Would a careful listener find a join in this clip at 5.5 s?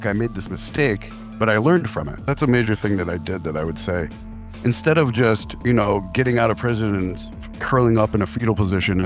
yes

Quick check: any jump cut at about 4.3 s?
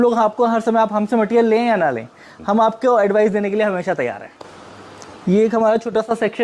yes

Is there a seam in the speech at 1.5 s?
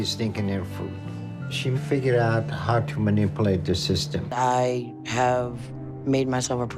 no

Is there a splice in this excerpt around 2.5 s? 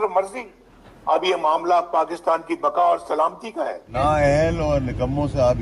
no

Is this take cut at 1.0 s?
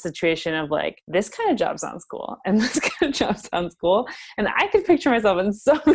yes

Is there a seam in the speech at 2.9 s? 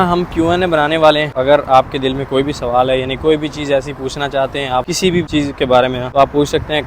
no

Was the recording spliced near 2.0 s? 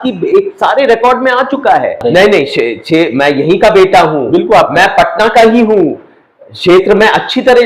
yes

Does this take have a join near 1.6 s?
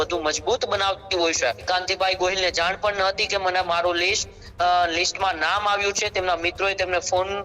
yes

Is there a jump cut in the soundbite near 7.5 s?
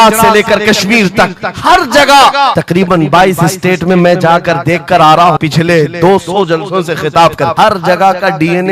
yes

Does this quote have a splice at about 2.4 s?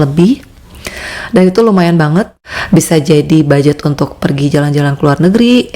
yes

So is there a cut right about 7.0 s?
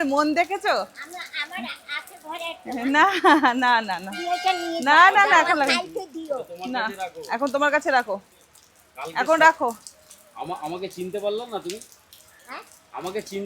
no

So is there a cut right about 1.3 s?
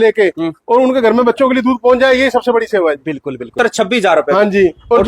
no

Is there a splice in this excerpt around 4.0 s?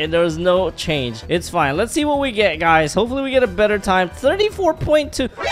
no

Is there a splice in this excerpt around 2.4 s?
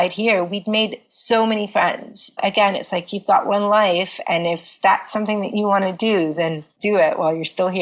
yes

